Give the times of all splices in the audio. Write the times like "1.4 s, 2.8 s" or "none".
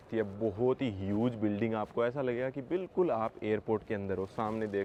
none